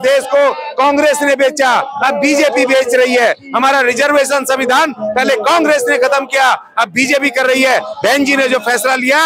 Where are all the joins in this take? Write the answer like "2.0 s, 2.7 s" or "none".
none